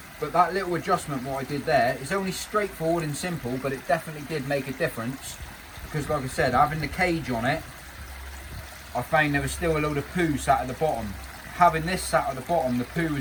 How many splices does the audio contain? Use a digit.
0